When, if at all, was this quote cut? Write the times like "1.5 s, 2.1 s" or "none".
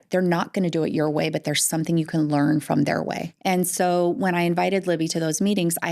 3.3 s